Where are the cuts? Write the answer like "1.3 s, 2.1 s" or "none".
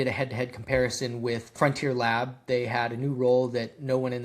1.5 s